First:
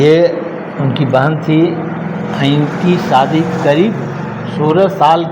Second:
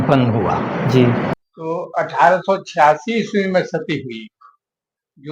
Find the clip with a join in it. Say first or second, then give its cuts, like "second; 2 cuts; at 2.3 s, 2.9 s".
second; 1 cut; at 1.3 s